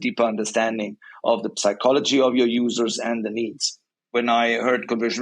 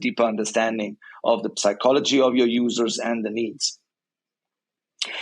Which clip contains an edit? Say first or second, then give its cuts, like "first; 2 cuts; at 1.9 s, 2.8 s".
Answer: first; 1 cut; at 4.0 s